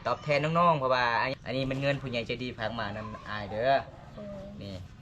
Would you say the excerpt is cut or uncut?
cut